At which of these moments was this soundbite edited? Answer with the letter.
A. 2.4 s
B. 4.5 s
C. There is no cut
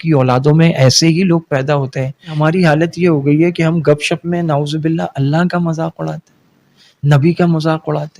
A